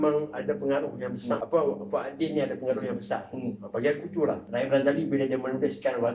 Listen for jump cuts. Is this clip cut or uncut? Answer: cut